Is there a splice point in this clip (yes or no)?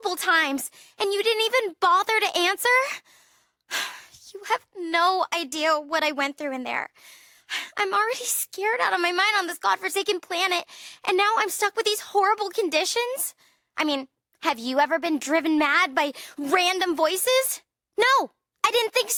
no